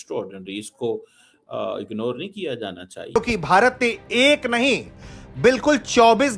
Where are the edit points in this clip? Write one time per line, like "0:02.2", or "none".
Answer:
0:03.2